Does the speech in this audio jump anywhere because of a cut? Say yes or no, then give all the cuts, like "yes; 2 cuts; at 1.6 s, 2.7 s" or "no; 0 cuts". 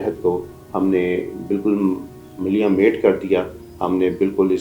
no; 0 cuts